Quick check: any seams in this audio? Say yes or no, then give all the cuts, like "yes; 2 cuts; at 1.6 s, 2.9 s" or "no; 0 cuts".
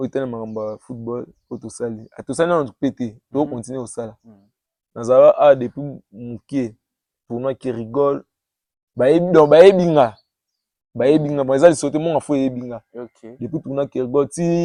no; 0 cuts